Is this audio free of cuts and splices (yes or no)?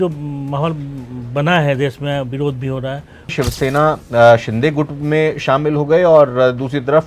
no